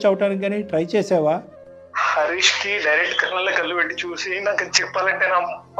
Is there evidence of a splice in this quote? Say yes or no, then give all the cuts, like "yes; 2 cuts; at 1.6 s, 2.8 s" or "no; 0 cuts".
no; 0 cuts